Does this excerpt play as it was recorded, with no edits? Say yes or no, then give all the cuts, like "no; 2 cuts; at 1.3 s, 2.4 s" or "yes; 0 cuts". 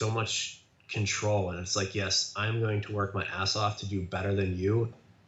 yes; 0 cuts